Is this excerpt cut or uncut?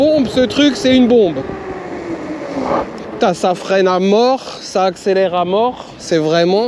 uncut